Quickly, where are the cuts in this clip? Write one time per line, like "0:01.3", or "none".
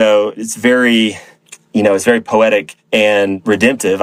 none